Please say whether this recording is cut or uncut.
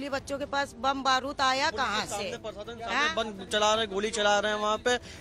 uncut